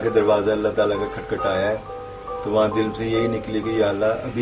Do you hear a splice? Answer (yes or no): no